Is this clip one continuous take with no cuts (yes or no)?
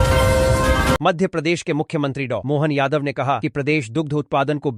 no